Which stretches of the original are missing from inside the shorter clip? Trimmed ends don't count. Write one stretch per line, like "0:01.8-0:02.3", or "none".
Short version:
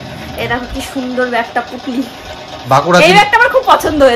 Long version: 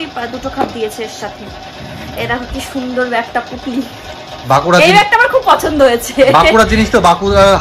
none